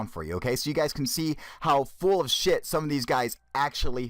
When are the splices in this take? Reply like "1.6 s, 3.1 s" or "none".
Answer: 1.4 s